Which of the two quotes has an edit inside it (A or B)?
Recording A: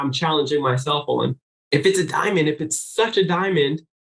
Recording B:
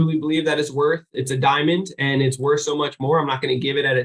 A